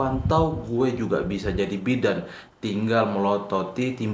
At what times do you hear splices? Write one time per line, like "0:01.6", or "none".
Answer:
none